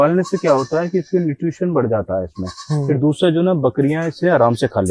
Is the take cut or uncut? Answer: uncut